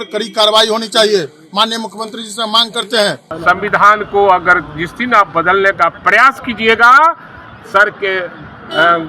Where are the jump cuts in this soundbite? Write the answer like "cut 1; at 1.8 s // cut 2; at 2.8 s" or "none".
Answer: cut 1; at 3.3 s